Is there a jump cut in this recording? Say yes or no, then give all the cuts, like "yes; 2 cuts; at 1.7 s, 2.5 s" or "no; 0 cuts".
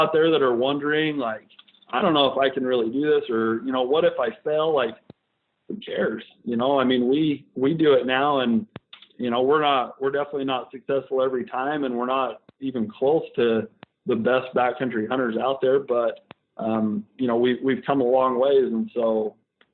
no; 0 cuts